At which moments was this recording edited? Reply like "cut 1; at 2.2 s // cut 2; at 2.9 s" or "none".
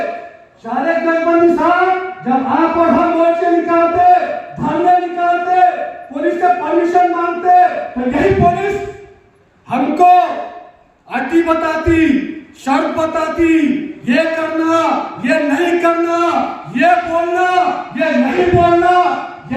none